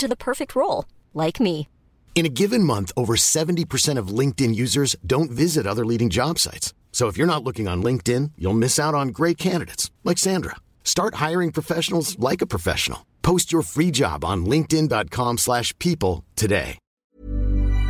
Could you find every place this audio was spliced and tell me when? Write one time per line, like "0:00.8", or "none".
0:17.0

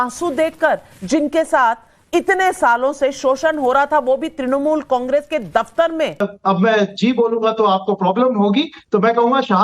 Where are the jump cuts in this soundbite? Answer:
0:06.2

